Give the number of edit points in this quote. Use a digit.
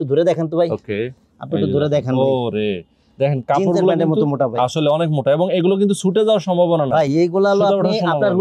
0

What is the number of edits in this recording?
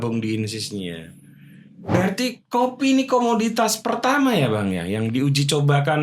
1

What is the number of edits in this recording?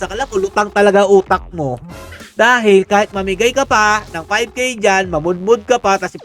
1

